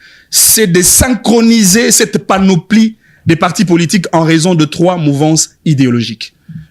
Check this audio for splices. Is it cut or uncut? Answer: uncut